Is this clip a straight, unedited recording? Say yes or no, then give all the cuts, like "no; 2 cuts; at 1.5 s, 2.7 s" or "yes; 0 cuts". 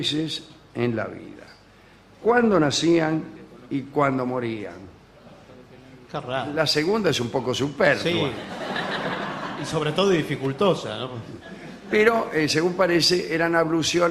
yes; 0 cuts